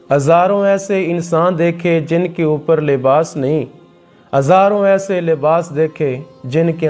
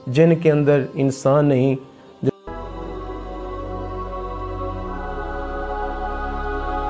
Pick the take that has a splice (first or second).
second